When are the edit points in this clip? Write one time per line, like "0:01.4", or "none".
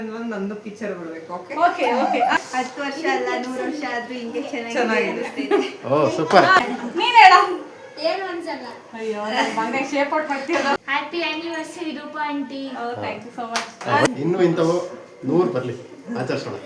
0:02.4
0:06.7
0:10.8
0:14.1